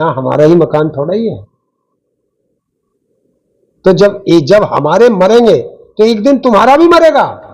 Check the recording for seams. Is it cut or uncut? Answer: uncut